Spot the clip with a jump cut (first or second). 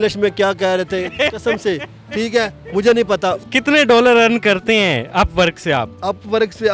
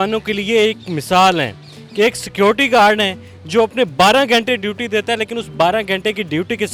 first